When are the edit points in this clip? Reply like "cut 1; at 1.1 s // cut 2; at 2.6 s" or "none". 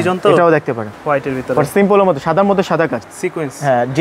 cut 1; at 0.9 s // cut 2; at 3.0 s